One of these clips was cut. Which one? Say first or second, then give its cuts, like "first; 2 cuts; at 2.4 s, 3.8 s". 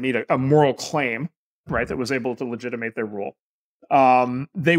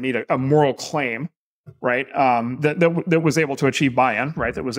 first; 1 cut; at 1.7 s